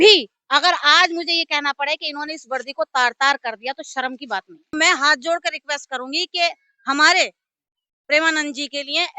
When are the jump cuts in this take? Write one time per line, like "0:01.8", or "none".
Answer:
0:04.7